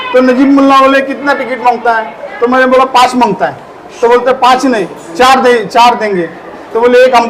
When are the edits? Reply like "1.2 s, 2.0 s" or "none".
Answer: none